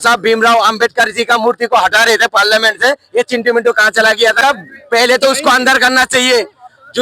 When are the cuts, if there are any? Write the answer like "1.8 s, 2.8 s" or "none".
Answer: 4.4 s